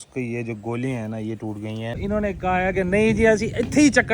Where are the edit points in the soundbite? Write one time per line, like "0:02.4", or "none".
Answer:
0:02.0